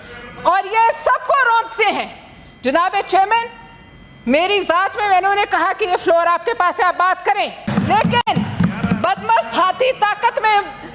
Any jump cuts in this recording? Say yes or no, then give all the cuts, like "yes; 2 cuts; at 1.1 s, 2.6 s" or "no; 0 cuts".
yes; 1 cut; at 7.7 s